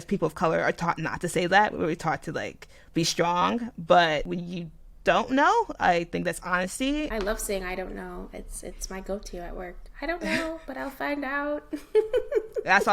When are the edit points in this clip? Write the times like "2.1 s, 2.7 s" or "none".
4.3 s, 7.1 s